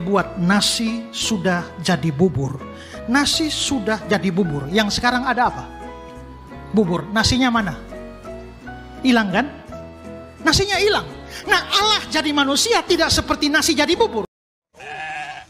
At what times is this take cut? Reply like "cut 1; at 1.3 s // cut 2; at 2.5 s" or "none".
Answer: cut 1; at 14.3 s